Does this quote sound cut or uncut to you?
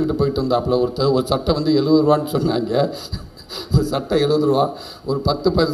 uncut